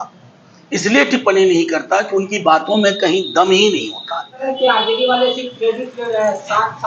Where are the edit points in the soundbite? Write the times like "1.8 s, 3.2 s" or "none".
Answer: 4.5 s